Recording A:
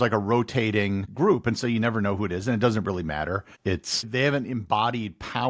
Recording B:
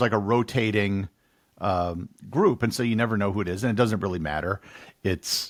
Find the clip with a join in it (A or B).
A